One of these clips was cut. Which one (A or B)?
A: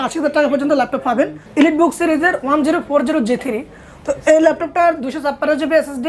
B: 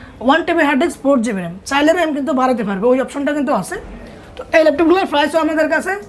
A